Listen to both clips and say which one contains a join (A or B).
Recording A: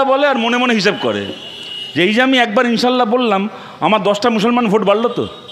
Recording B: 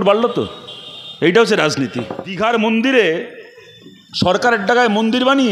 B